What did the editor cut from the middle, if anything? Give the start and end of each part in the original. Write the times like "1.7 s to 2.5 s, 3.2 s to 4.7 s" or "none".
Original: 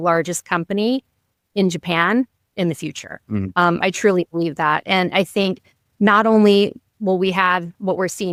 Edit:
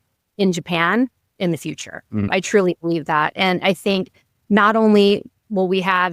3.5 s to 3.8 s